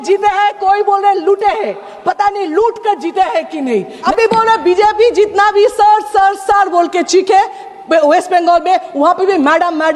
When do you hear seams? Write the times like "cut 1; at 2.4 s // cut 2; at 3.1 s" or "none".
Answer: cut 1; at 4.0 s

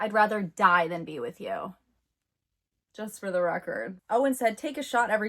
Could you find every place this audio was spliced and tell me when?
cut 1; at 4.0 s

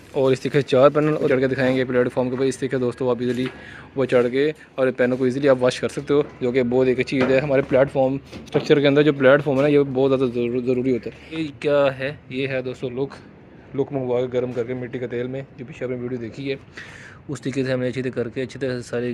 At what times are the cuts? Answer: cut 1; at 1.3 s // cut 2; at 11.5 s

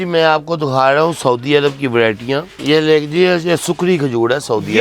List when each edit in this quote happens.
cut 1; at 2.5 s

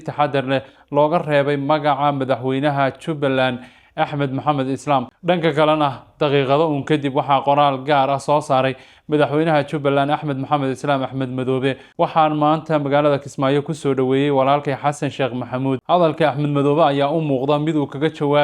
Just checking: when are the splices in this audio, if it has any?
cut 1; at 5.1 s // cut 2; at 11.8 s // cut 3; at 15.8 s

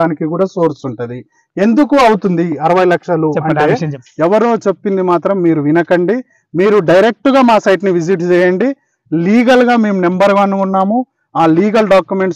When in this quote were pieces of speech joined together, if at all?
cut 1; at 4.0 s

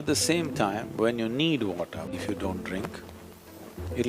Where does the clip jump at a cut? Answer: cut 1; at 2.1 s

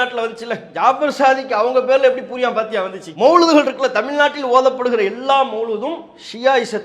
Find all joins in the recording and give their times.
none

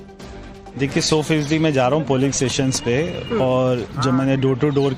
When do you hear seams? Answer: none

